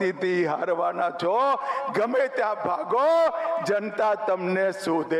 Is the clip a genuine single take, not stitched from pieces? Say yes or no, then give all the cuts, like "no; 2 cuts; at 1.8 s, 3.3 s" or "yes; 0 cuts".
yes; 0 cuts